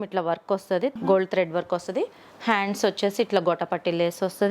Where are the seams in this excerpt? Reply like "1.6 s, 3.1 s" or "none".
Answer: 0.9 s